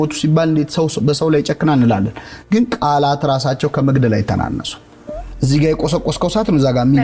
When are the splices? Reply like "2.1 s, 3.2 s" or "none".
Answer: none